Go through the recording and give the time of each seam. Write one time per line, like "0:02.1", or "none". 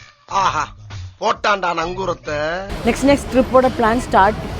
0:02.7